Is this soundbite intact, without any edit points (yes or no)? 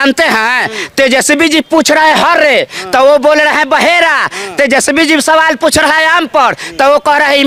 yes